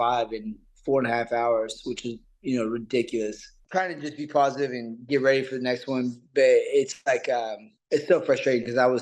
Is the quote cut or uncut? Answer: cut